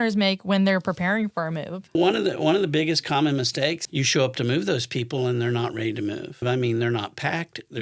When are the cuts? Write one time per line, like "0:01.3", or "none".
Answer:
0:01.9
0:03.9
0:06.4